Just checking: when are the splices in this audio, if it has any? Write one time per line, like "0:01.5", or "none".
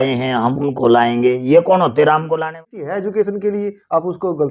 0:02.6